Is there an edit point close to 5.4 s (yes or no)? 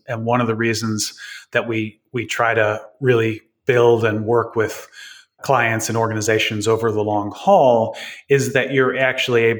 yes